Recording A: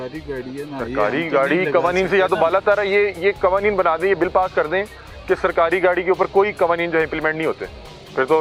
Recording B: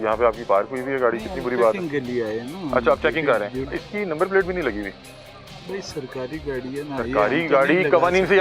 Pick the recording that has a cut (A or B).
B